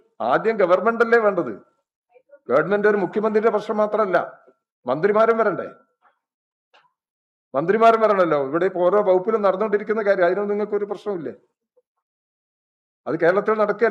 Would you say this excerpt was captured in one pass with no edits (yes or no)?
yes